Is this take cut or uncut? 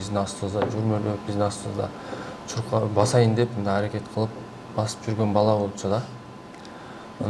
uncut